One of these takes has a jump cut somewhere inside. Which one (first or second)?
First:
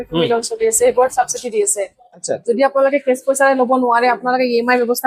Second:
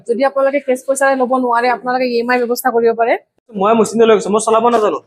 second